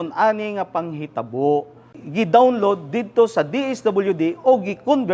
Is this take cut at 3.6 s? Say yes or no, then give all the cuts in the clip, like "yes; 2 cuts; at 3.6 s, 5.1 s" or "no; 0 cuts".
no; 1 cut; at 2.0 s